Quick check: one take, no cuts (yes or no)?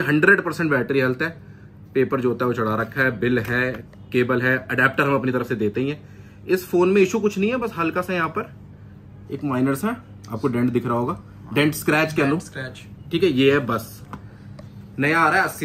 yes